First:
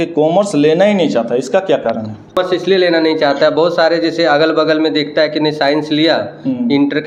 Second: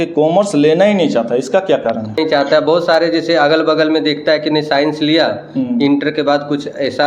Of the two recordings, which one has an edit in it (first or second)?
second